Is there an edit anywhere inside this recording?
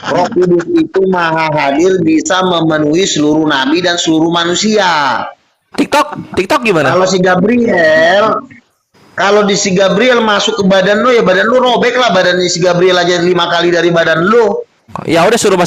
no; 0 cuts

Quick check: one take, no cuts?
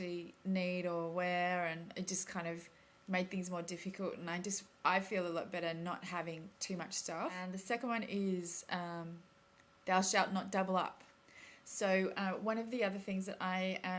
no; 1 cut; at 2.0 s

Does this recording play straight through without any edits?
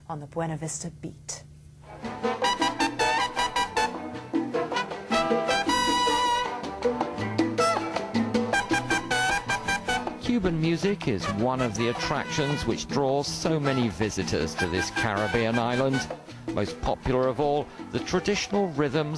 no; 1 cut; at 10.4 s

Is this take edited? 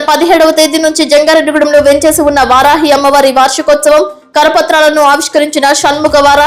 no; 0 cuts

